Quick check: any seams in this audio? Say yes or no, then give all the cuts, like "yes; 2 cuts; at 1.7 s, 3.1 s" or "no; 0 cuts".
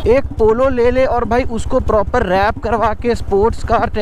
no; 0 cuts